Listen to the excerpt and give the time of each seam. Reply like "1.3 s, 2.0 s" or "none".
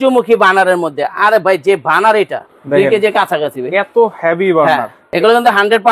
2.5 s, 5.0 s